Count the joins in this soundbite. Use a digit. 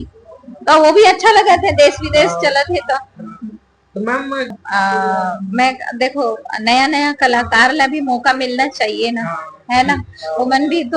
1